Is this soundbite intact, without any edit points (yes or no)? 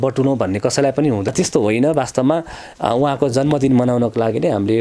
no